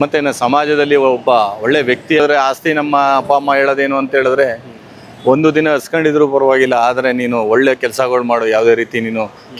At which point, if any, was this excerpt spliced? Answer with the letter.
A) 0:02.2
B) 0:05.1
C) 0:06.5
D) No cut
A